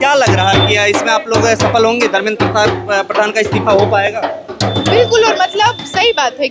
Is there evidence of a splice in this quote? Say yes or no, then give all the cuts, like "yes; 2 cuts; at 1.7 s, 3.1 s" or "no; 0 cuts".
no; 0 cuts